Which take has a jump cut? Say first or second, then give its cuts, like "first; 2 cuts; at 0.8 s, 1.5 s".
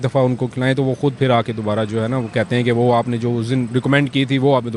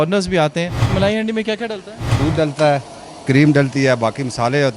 second; 2 cuts; at 0.8 s, 2.2 s